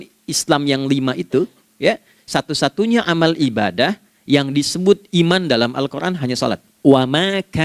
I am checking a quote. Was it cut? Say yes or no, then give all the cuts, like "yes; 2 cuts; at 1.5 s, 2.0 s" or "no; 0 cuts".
yes; 1 cut; at 6.7 s